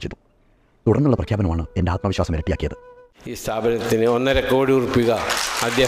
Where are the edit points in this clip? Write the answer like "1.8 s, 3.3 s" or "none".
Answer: none